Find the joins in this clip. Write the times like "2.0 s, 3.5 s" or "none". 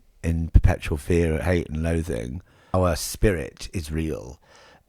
2.7 s